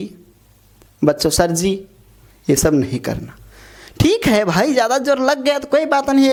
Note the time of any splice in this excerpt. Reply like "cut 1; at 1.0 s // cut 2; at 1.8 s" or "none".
none